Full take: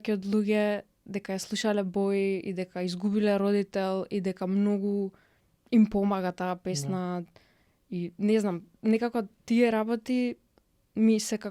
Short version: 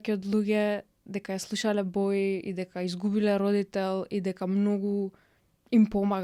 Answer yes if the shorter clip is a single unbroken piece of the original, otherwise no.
yes